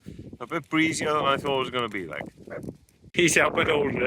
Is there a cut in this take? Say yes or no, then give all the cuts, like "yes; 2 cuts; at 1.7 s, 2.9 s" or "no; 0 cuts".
yes; 1 cut; at 3.1 s